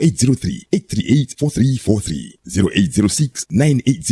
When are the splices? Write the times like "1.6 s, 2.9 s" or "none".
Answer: 1.4 s